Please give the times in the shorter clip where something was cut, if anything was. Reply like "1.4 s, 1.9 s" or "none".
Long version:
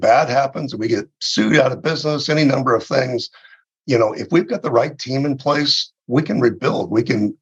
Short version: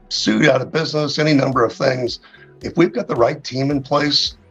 2.6 s

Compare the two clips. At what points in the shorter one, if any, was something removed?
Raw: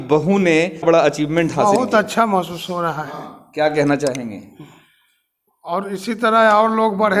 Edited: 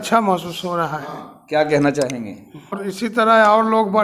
2.8 s

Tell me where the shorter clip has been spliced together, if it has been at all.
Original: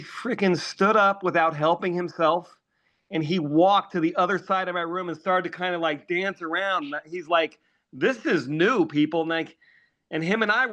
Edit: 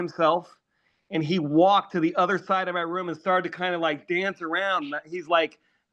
none

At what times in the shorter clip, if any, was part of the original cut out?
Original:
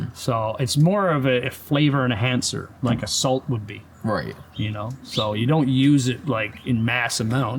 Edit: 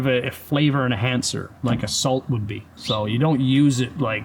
2.7 s

